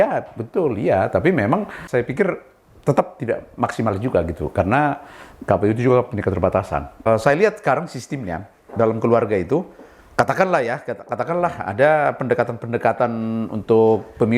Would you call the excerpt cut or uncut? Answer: cut